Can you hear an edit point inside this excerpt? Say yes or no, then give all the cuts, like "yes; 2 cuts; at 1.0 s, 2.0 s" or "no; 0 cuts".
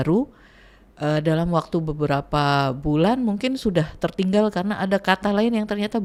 no; 0 cuts